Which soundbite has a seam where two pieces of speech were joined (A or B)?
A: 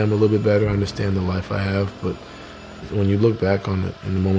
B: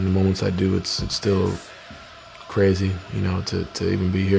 A